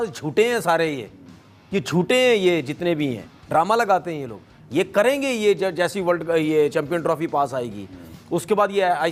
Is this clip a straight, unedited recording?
yes; 0 cuts

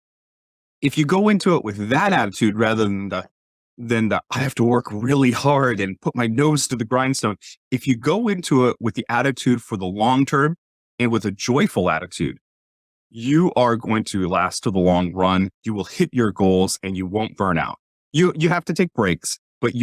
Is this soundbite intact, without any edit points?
no; 1 cut; at 17.9 s

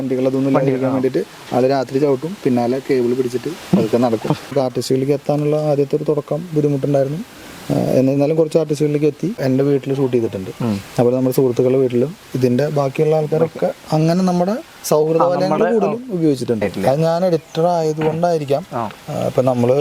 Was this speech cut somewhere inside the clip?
yes; 3 cuts; at 4.5 s, 9.4 s, 16.7 s

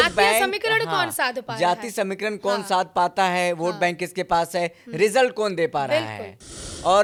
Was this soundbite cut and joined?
no; 0 cuts

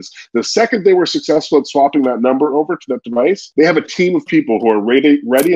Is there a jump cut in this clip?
yes; 1 cut; at 3.4 s

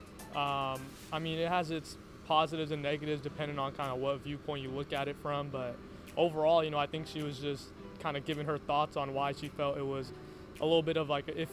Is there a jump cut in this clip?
no; 0 cuts

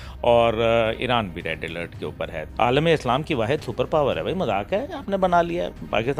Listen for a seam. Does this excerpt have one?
yes; 1 cut; at 2.4 s

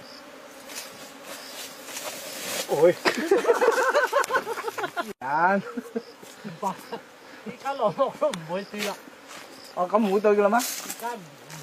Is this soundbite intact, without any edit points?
yes; 0 cuts

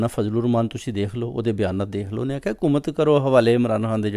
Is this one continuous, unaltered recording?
yes; 0 cuts

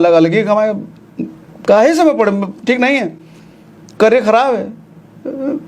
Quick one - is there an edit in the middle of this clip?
no; 0 cuts

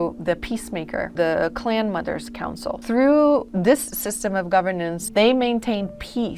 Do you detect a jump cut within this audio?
yes; 4 cuts; at 1.1 s, 2.8 s, 3.5 s, 5.0 s

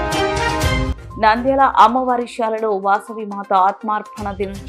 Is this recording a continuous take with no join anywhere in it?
no; 1 cut; at 1.0 s

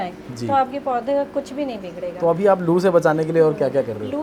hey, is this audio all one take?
yes; 0 cuts

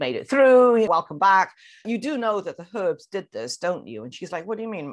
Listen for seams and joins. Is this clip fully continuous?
no; 2 cuts; at 0.9 s, 1.8 s

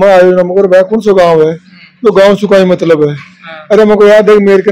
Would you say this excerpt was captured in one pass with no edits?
yes; 0 cuts

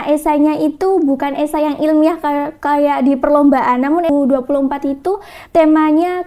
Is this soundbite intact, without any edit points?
no; 1 cut; at 4.1 s

